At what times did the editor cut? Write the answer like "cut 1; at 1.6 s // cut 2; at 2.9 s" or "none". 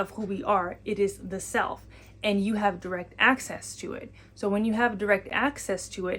none

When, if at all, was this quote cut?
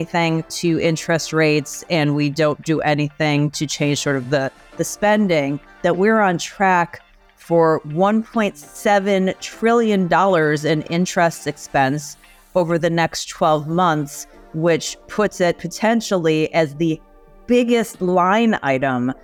none

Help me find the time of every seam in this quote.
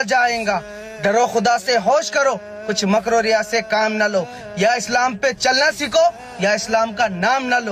none

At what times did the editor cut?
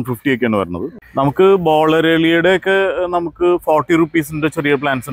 cut 1; at 1.1 s

